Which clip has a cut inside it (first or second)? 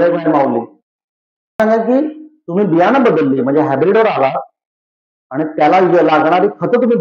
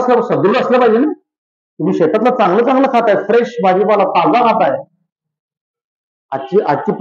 first